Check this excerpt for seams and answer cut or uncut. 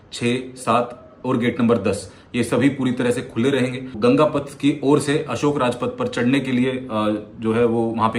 cut